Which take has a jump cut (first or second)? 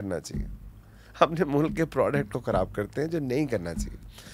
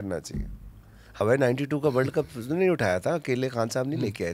second